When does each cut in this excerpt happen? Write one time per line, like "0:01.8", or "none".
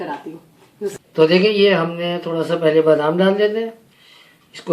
0:01.0